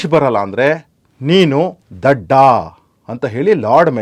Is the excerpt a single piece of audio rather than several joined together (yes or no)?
yes